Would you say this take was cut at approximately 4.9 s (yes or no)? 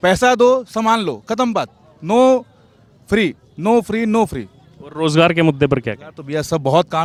no